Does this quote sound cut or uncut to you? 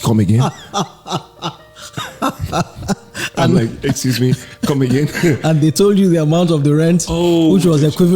uncut